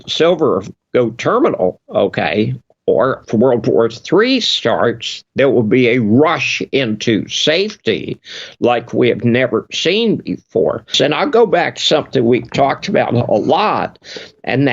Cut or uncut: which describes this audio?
cut